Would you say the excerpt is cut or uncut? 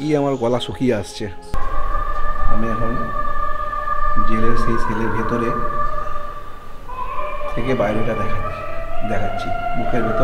cut